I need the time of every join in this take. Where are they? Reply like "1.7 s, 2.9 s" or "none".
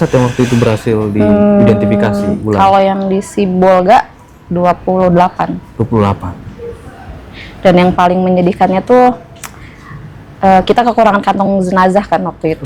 none